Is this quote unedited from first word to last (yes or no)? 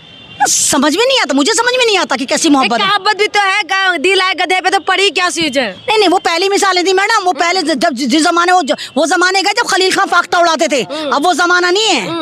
yes